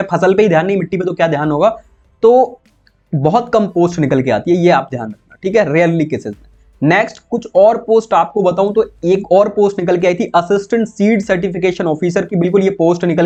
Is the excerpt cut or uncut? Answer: uncut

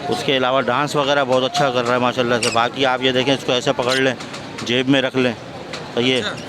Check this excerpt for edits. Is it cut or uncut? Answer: uncut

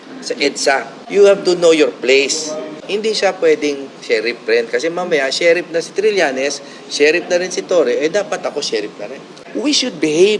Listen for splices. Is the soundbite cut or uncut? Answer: cut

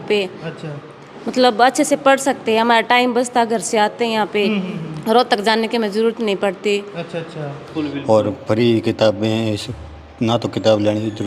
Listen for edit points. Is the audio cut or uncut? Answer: cut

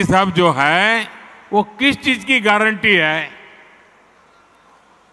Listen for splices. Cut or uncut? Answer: uncut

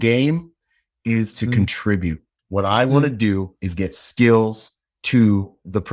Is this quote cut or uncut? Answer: cut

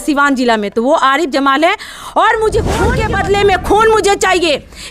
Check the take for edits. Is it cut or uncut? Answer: cut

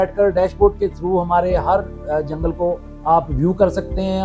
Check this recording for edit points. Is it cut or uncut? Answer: uncut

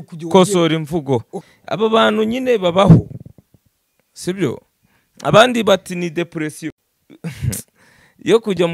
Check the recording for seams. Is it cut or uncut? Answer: cut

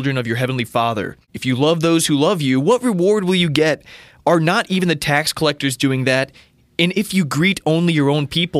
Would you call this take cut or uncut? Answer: cut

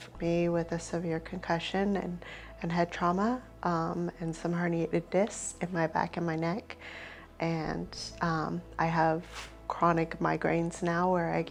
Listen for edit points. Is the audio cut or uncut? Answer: uncut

